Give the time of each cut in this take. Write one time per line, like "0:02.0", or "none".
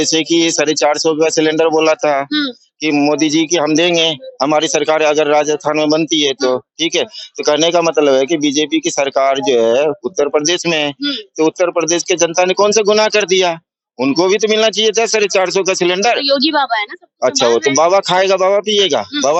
none